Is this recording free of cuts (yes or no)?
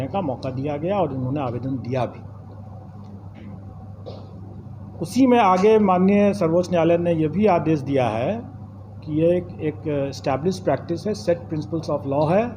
yes